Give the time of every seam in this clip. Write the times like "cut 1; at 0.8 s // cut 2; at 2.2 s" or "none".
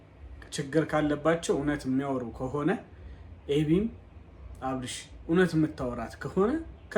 none